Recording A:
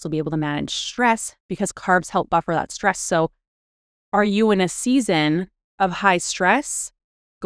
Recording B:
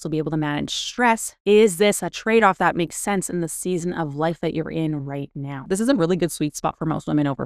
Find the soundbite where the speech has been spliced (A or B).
B